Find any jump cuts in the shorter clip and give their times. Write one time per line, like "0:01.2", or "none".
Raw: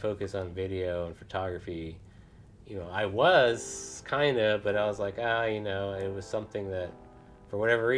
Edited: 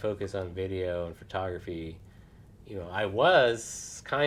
none